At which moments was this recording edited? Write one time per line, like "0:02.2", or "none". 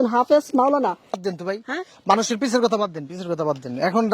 0:01.2